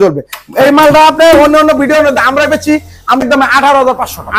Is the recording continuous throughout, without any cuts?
no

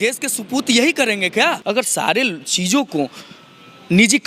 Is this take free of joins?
no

